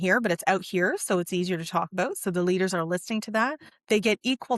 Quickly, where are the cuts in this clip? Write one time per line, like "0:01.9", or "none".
0:03.7